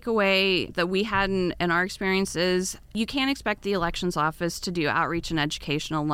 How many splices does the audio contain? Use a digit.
1